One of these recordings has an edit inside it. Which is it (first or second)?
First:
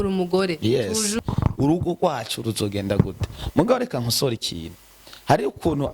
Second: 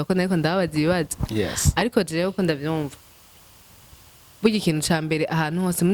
first